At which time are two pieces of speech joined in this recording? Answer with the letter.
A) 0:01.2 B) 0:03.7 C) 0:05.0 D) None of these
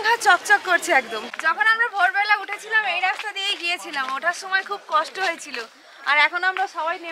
A